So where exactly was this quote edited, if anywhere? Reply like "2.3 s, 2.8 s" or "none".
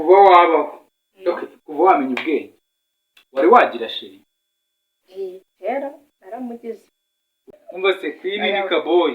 7.6 s